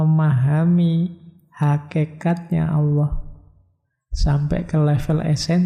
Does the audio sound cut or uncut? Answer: uncut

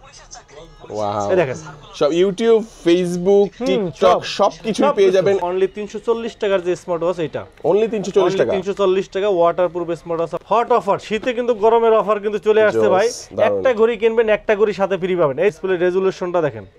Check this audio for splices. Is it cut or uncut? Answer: cut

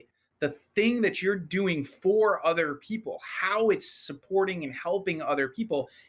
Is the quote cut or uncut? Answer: uncut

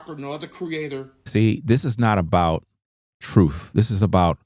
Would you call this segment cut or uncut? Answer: uncut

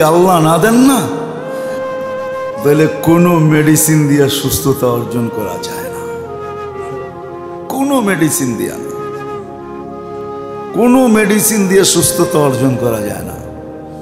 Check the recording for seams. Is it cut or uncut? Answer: cut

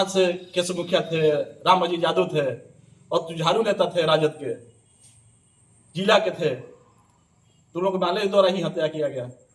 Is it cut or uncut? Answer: uncut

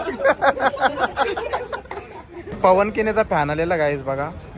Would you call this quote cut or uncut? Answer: cut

